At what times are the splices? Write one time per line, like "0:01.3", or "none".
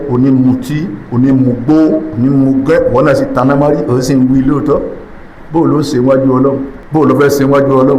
0:06.7

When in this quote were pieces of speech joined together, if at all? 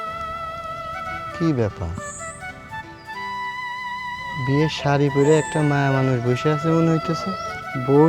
0:00.9
0:02.0
0:04.4

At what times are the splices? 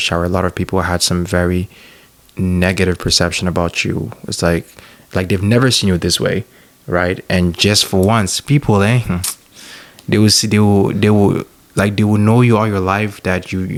none

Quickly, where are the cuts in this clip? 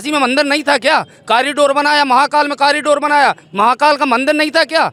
none

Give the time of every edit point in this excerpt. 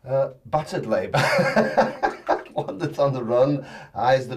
none

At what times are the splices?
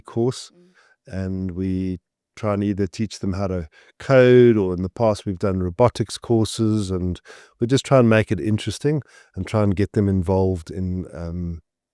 none

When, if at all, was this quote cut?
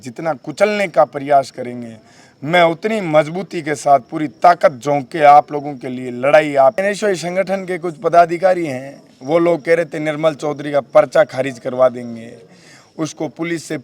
0:06.8

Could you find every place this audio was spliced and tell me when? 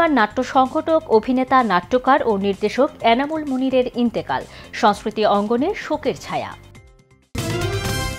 0:07.3

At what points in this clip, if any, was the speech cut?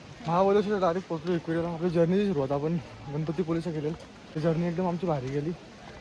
0:04.1

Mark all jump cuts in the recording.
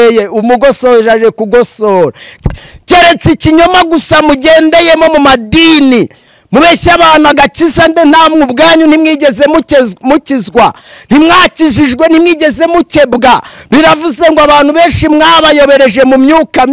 0:02.3

